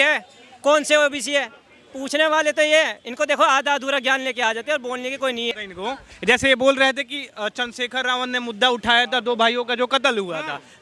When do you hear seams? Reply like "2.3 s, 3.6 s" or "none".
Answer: 5.5 s